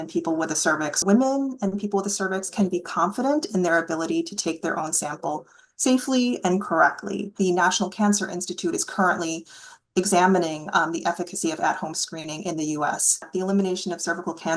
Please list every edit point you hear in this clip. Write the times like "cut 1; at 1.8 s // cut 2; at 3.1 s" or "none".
cut 1; at 1.0 s // cut 2; at 7.3 s // cut 3; at 13.3 s

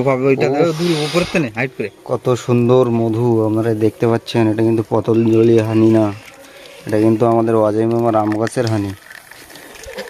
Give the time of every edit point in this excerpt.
none

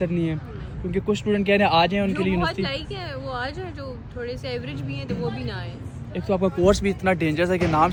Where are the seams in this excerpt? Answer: none

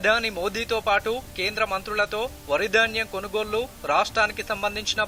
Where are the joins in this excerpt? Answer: none

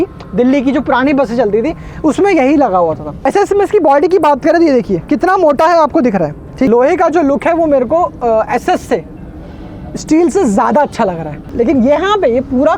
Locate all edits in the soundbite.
cut 1; at 3.2 s // cut 2; at 6.7 s // cut 3; at 11.5 s

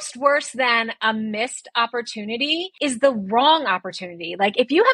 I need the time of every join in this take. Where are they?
cut 1; at 2.7 s

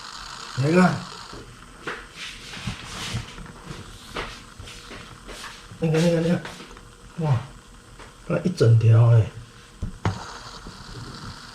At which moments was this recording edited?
cut 1; at 5.8 s

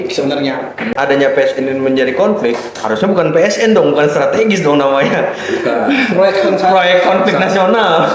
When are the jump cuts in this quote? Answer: cut 1; at 0.9 s

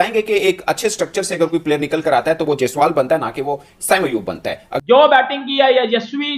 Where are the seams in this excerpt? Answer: cut 1; at 4.6 s

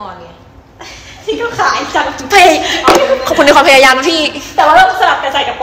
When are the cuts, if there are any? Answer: none

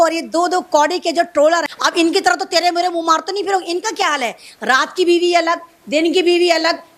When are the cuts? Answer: cut 1; at 1.7 s

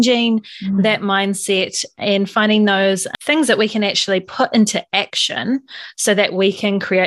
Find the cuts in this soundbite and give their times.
cut 1; at 3.1 s

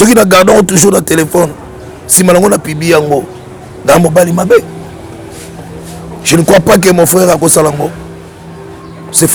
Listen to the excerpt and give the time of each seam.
none

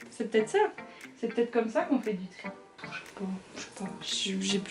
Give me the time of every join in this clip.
cut 1; at 2.8 s

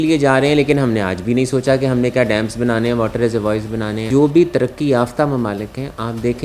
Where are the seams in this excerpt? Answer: cut 1; at 4.1 s

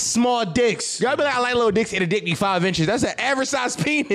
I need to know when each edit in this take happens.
cut 1; at 0.9 s

